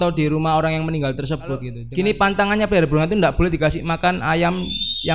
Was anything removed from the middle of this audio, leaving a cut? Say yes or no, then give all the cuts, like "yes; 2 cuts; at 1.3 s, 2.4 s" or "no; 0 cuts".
yes; 1 cut; at 1.8 s